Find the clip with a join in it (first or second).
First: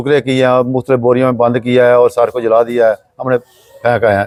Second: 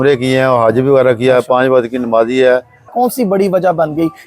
second